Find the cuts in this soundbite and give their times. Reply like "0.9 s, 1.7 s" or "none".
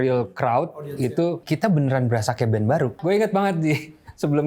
1.4 s, 3.0 s